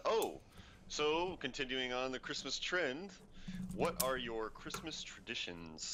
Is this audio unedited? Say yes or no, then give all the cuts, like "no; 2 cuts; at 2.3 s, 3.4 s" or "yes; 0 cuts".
yes; 0 cuts